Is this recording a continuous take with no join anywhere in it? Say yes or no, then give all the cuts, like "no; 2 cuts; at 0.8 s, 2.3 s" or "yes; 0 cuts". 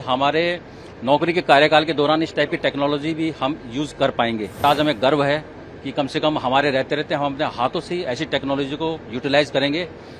no; 1 cut; at 4.6 s